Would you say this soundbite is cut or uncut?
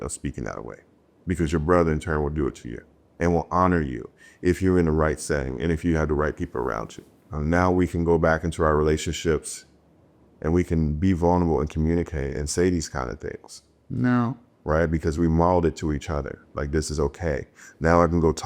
cut